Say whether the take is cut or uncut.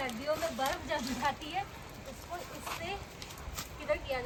uncut